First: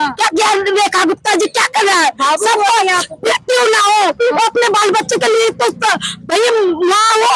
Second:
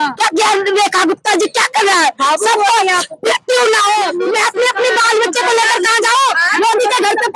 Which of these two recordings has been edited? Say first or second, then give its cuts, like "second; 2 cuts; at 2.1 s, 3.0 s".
second; 1 cut; at 4.1 s